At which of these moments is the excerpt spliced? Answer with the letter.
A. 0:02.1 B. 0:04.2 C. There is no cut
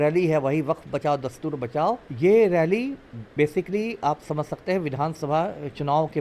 A